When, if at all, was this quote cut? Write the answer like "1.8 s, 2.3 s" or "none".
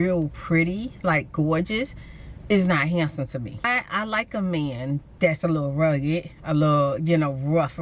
3.7 s